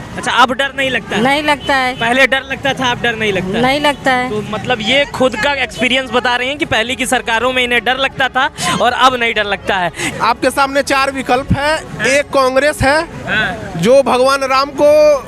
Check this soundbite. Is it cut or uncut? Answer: cut